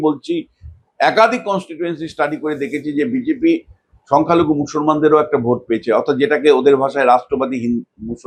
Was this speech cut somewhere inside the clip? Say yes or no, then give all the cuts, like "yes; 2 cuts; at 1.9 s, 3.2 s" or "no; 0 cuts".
no; 0 cuts